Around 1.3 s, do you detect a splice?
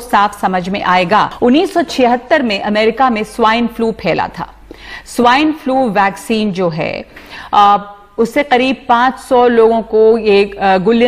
yes; 1 cut; at 1.3 s

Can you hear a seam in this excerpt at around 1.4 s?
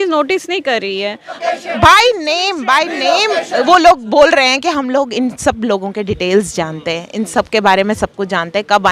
yes; 1 cut; at 1.4 s

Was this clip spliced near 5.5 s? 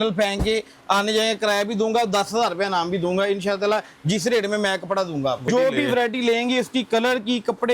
yes; 1 cut; at 5.5 s

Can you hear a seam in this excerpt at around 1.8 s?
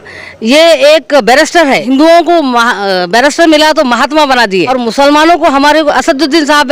yes; 2 cuts; at 1.8 s, 4.7 s

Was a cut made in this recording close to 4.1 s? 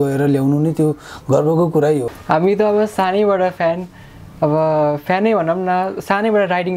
no; 1 cut; at 2.1 s

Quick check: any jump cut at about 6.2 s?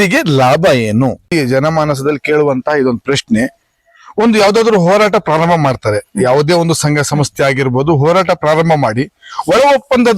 no; 1 cut; at 1.3 s

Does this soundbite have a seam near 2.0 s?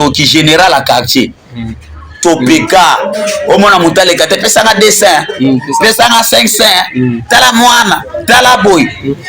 yes; 1 cut; at 2.0 s

